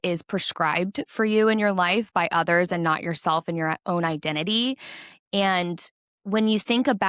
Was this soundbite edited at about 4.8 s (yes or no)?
no